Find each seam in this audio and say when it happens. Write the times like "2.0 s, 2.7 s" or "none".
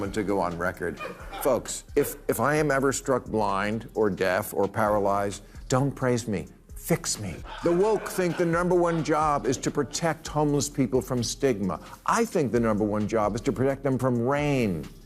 7.5 s